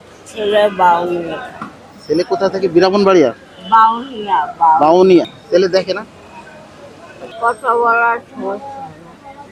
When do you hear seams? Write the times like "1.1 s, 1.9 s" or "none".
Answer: 5.4 s, 7.3 s

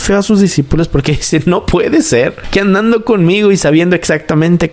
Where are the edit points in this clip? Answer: none

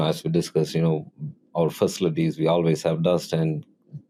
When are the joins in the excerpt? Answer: none

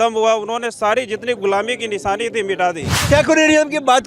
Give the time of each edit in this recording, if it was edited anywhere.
3.0 s

